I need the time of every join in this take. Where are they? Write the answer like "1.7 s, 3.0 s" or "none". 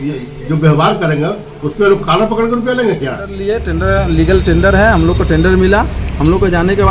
3.4 s